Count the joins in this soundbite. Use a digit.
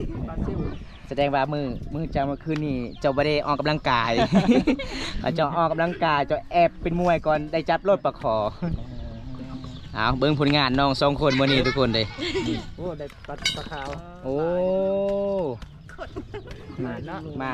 0